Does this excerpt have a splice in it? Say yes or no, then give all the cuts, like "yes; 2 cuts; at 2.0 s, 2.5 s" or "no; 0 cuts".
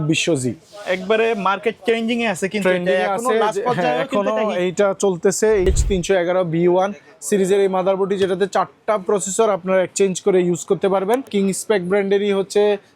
yes; 2 cuts; at 5.7 s, 11.3 s